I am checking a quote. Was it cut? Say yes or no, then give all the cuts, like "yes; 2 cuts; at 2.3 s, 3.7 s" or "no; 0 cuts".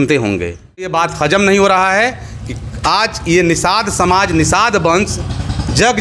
yes; 1 cut; at 0.9 s